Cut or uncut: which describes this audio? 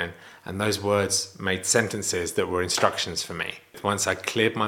cut